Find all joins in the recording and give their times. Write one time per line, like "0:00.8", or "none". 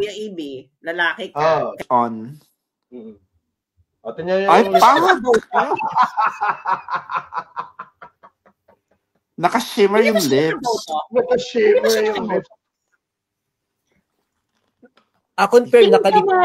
0:01.8